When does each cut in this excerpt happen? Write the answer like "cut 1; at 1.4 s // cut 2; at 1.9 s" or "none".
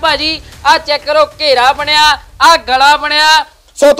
none